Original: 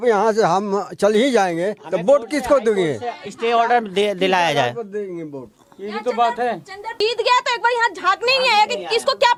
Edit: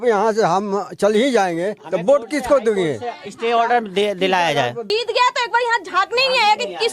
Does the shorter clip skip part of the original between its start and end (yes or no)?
yes